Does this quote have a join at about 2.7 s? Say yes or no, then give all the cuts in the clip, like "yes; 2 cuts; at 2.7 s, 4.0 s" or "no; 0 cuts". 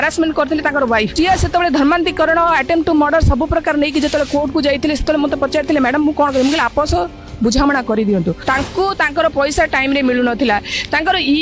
no; 2 cuts; at 1.1 s, 8.4 s